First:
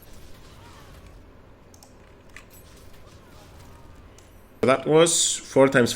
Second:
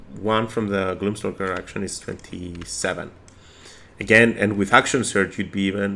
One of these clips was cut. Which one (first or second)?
first